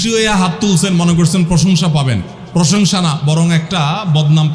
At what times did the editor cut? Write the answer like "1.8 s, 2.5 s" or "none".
none